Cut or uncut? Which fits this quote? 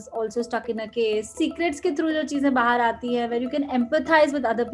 cut